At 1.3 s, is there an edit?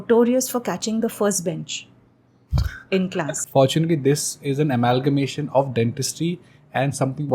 no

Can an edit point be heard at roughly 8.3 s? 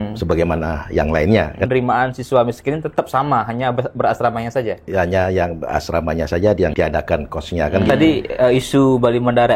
yes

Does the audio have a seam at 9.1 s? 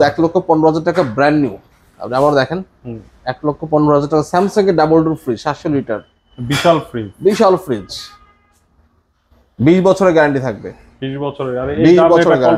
no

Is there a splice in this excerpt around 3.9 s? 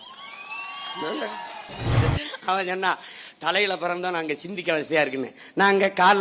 no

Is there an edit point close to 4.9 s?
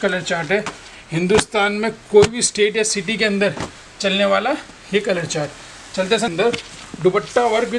no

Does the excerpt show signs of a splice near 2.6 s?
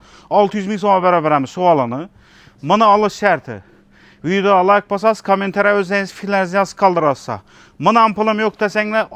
no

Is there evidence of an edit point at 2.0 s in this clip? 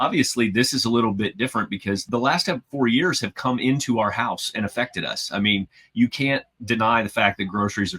yes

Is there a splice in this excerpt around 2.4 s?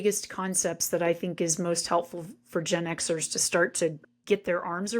no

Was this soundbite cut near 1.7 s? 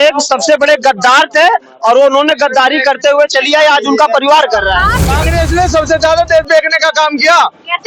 no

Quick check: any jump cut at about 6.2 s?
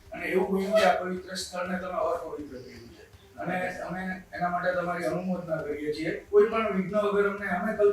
yes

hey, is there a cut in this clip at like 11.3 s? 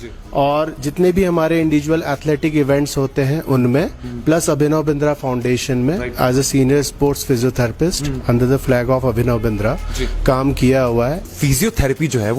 yes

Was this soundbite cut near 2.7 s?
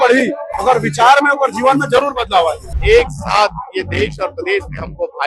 yes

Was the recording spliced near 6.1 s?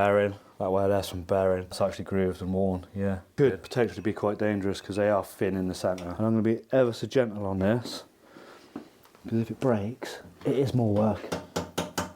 yes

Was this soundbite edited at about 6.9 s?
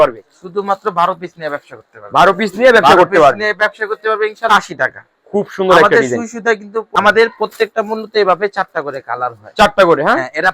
yes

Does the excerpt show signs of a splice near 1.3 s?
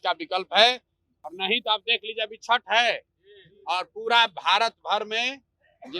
yes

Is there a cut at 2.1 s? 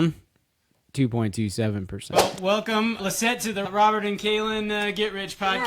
yes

